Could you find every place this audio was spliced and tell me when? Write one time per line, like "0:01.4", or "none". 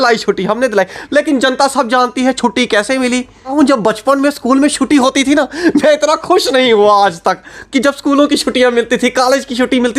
0:03.5